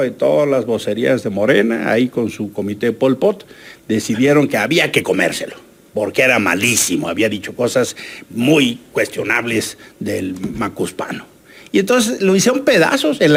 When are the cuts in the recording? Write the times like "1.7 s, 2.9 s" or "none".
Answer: none